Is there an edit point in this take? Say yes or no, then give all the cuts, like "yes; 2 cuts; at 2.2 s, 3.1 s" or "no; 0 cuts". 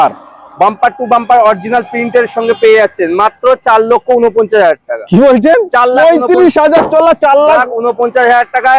no; 0 cuts